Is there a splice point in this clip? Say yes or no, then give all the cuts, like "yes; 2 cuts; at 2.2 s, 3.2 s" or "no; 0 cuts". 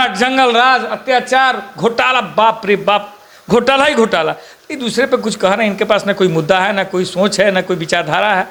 no; 0 cuts